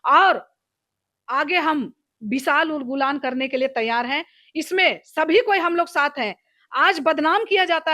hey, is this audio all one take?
yes; 0 cuts

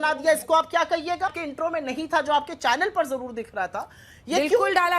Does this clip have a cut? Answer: yes; 1 cut; at 1.4 s

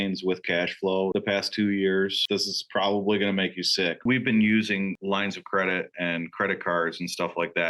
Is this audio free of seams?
no; 3 cuts; at 1.1 s, 2.2 s, 4.0 s

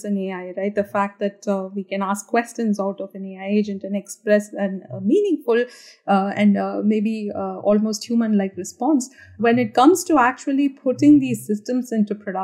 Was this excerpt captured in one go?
yes; 0 cuts

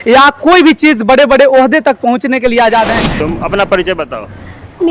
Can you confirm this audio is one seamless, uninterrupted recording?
no; 1 cut; at 3.2 s

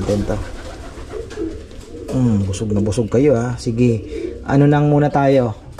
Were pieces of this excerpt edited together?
no; 0 cuts

